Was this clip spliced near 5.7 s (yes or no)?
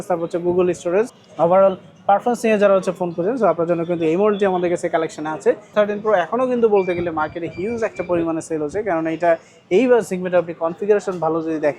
yes